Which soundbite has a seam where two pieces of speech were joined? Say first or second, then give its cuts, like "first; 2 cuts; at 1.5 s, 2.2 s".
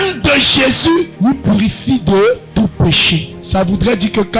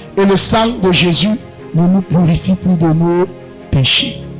first; 3 cuts; at 1.1 s, 2.4 s, 3.4 s